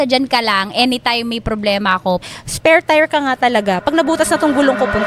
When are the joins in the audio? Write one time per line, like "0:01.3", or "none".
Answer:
0:02.2

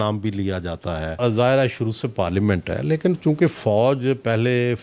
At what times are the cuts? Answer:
0:01.1

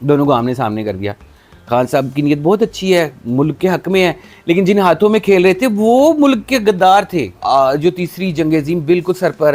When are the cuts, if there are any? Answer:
0:07.4

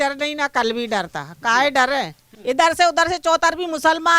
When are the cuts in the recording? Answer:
0:02.3

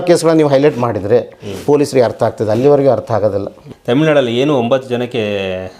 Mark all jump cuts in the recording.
0:03.6

